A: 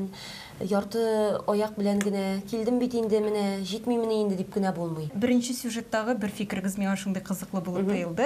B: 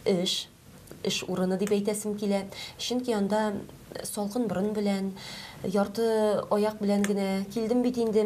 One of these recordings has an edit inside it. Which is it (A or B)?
A